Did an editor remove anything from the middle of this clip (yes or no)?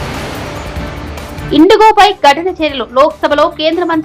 no